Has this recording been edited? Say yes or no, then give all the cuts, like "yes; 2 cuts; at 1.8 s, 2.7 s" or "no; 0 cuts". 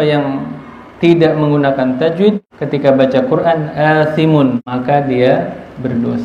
yes; 2 cuts; at 2.5 s, 4.6 s